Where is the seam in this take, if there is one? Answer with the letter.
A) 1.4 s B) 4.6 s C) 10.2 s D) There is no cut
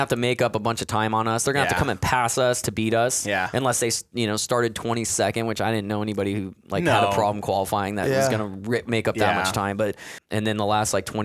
C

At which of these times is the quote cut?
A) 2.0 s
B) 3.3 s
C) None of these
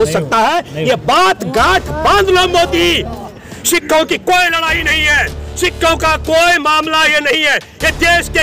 B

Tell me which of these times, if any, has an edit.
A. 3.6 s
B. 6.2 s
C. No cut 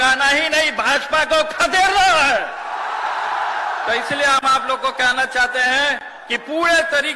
C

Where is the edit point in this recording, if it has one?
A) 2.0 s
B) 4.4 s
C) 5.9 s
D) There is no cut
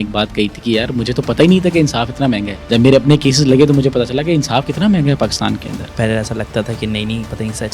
C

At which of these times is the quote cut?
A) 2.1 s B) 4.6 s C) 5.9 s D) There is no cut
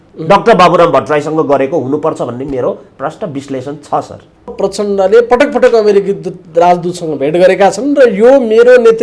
B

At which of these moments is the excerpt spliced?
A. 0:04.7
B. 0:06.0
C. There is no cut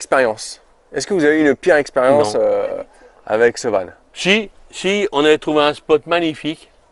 C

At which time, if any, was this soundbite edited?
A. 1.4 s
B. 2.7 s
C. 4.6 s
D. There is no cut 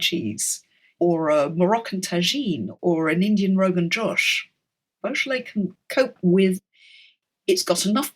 B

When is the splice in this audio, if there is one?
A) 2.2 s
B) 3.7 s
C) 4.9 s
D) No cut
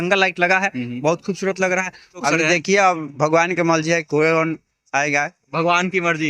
A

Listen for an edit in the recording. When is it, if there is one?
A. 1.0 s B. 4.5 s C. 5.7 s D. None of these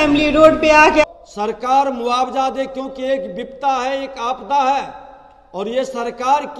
A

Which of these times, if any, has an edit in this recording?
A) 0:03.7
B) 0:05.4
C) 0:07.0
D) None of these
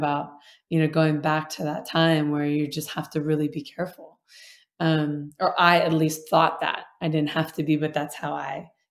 D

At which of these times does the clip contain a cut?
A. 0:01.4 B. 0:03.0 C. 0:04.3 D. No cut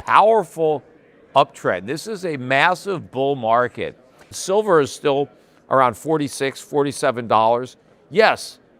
C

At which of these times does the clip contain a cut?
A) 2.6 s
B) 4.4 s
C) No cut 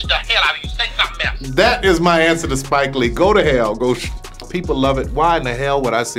B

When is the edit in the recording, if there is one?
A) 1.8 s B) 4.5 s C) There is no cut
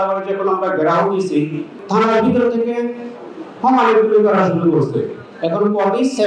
A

